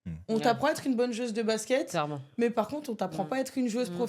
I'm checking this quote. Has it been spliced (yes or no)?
no